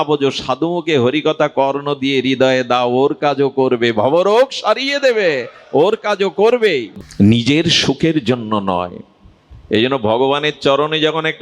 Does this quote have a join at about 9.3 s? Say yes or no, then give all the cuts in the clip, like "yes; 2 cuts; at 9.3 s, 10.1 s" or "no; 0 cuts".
no; 1 cut; at 7.0 s